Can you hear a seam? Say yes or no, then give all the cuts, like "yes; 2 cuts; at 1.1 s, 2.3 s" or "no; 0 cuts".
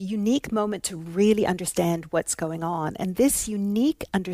no; 0 cuts